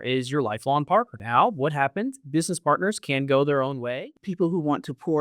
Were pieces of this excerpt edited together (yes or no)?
yes